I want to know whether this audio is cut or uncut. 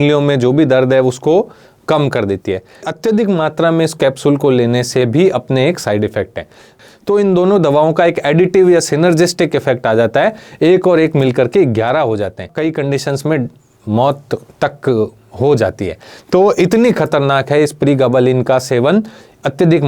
cut